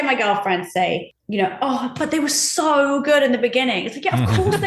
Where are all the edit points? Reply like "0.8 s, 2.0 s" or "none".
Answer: 1.2 s

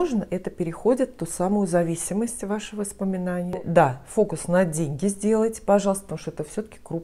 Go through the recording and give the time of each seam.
3.7 s

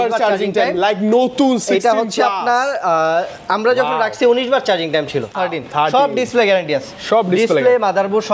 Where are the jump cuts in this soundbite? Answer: 5.4 s

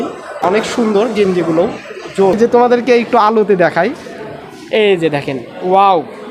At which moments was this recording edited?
2.4 s

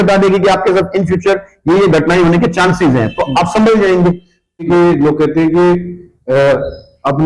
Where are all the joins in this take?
4.7 s

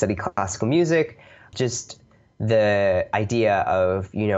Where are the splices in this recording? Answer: 1.4 s

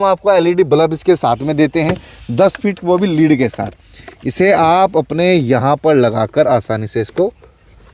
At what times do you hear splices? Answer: none

